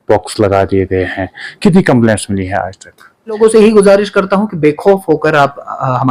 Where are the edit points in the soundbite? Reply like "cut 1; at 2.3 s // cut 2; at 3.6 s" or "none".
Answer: cut 1; at 3.4 s